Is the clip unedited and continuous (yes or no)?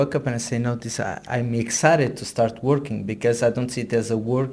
yes